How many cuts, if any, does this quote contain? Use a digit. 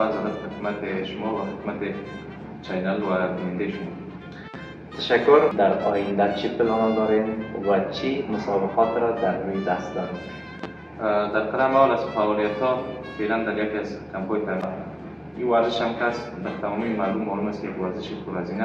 2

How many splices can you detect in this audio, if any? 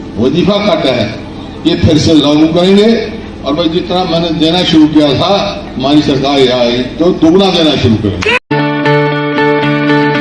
1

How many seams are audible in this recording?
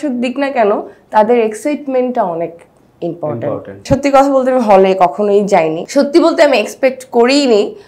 2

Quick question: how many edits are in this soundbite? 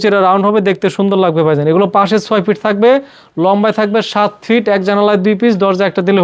0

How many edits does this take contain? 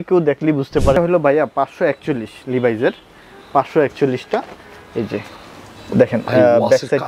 1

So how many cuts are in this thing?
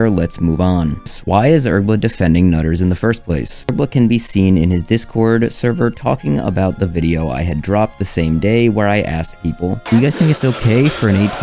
2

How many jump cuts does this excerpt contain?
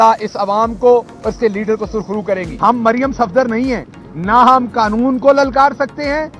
1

